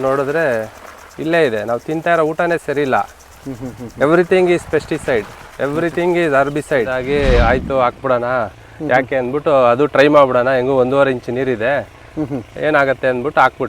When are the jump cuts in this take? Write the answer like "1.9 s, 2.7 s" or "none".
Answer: 6.9 s